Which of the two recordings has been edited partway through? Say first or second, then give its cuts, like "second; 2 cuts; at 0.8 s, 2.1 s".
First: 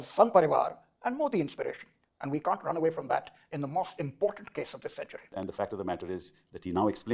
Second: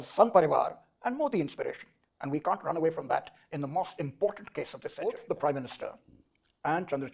second; 1 cut; at 5.0 s